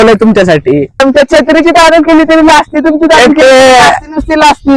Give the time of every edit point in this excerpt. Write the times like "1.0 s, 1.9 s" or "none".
1.0 s